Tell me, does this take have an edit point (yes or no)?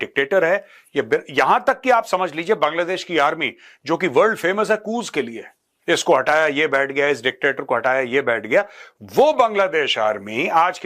no